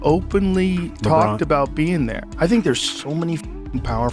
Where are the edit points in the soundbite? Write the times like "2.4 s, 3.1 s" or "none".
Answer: 2.2 s